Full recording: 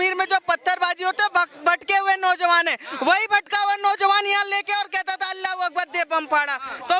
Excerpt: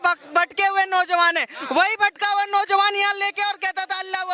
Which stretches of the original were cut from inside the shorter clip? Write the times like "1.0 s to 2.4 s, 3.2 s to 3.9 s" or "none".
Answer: none